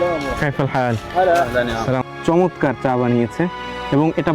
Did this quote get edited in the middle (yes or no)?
yes